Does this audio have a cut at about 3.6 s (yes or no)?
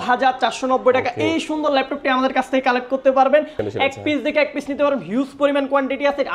yes